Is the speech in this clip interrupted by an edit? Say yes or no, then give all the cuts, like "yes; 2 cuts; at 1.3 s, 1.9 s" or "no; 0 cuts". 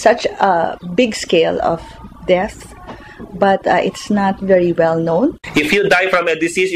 yes; 1 cut; at 5.4 s